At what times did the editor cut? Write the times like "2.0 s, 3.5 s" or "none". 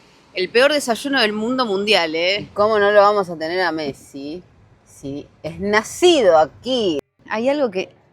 2.5 s, 7.1 s